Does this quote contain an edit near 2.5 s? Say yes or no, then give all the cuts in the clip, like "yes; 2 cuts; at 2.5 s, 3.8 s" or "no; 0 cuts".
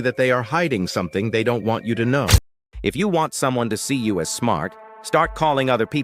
yes; 1 cut; at 2.5 s